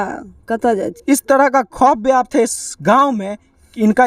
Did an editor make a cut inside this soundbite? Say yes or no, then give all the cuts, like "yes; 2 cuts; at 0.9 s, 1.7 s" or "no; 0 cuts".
yes; 1 cut; at 0.9 s